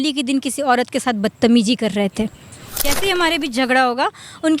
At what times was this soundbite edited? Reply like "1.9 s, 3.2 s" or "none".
2.8 s